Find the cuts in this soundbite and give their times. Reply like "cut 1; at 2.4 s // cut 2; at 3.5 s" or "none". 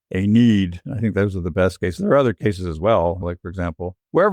cut 1; at 3.3 s